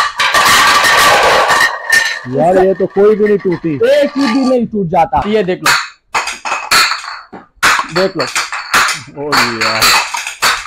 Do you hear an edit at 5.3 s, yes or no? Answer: yes